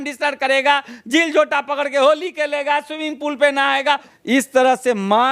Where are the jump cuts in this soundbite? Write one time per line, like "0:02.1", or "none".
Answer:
0:04.1